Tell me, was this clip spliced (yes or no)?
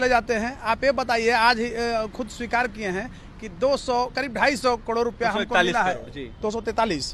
no